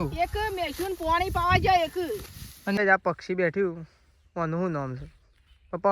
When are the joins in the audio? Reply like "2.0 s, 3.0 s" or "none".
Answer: 2.8 s